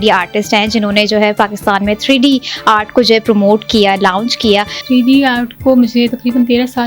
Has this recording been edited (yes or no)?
yes